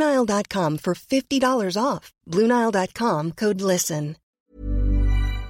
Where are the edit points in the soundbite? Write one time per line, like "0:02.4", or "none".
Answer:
0:04.2